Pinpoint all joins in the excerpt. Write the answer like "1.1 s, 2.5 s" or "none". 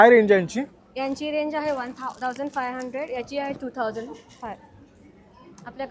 none